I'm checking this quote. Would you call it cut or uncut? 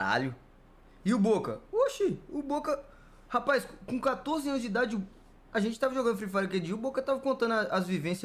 uncut